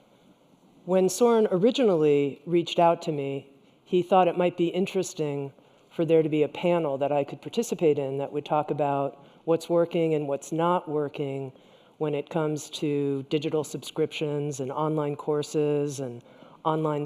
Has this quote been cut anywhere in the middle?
yes; 1 cut; at 15.2 s

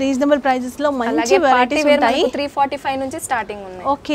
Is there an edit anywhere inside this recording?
no; 0 cuts

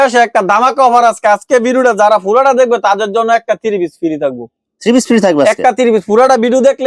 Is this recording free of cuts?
yes; 0 cuts

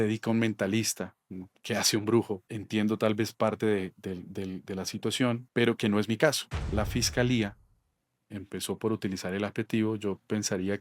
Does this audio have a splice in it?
yes; 3 cuts; at 2.5 s, 5.4 s, 6.5 s

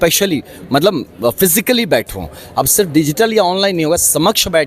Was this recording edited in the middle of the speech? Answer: no; 0 cuts

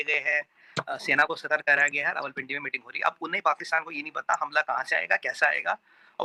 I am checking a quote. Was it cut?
no; 0 cuts

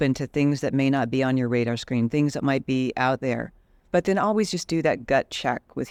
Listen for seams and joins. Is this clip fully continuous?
yes; 0 cuts

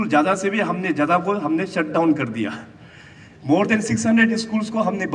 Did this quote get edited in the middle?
no; 0 cuts

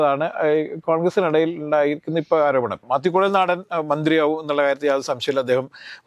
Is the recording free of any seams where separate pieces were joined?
no; 1 cut; at 2.8 s

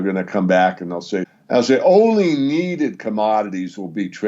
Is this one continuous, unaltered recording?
no; 1 cut; at 1.3 s

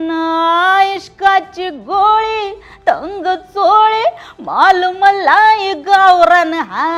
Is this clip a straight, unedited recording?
yes; 0 cuts

